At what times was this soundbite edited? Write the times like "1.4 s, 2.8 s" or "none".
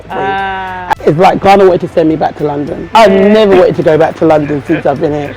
0.9 s, 2.8 s

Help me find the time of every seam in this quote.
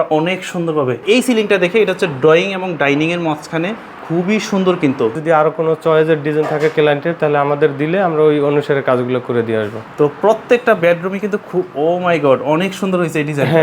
1.0 s, 5.2 s, 9.8 s

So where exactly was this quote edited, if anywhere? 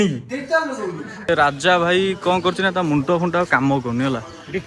1.3 s

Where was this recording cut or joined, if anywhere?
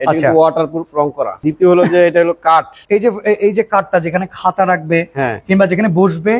1.4 s, 2.8 s

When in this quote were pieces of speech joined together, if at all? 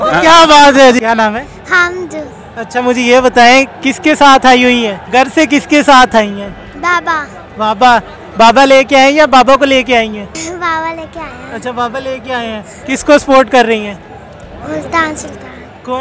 none

